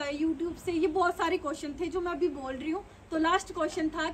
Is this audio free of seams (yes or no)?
yes